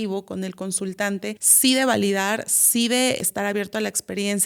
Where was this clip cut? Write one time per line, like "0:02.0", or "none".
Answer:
0:01.5
0:03.2